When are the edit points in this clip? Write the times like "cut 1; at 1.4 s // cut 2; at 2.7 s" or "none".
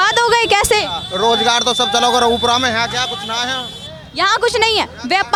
none

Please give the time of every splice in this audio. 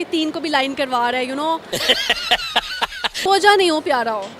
cut 1; at 3.2 s

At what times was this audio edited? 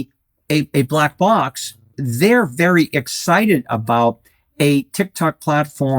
cut 1; at 2.0 s

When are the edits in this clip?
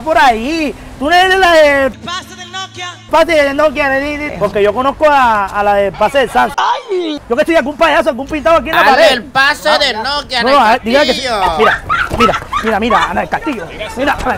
cut 1; at 4.2 s // cut 2; at 7.1 s

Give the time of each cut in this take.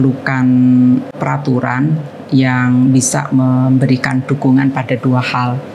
cut 1; at 1.1 s

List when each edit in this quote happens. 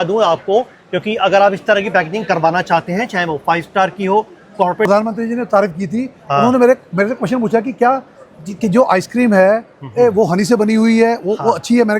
cut 1; at 4.9 s

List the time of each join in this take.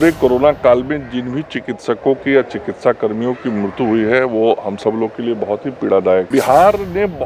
cut 1; at 6.3 s

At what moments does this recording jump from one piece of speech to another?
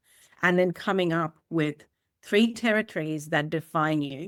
none

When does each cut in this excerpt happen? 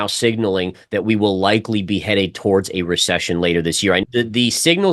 cut 1; at 4.0 s

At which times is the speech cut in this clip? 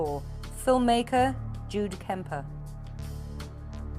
cut 1; at 2.8 s

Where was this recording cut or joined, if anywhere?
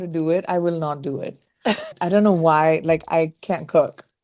none

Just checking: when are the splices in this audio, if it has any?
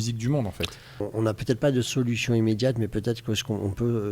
cut 1; at 0.9 s

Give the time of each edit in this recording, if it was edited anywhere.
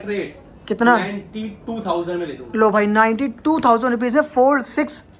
none

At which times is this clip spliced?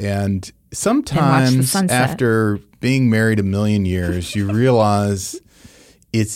cut 1; at 2.7 s

